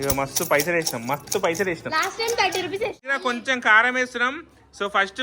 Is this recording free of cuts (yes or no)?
no